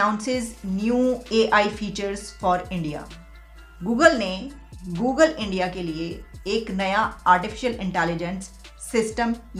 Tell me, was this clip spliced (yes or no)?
no